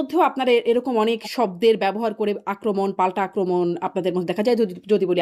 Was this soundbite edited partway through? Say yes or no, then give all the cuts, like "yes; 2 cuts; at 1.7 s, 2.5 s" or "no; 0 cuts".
no; 0 cuts